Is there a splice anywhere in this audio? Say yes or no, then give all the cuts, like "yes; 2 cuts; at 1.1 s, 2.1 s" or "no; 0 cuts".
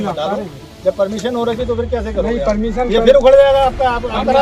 no; 0 cuts